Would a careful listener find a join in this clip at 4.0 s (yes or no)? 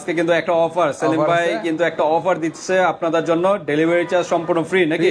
no